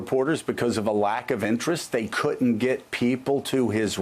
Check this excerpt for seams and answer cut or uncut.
uncut